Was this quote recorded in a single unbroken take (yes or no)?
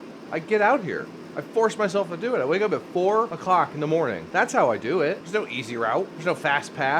no